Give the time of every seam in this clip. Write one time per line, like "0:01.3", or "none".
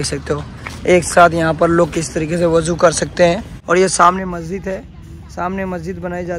0:03.5